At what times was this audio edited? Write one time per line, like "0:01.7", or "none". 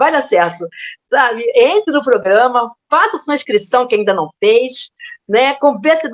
none